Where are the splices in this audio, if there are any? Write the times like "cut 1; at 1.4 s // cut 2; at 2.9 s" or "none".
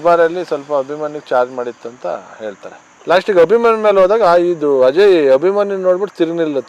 cut 1; at 2.9 s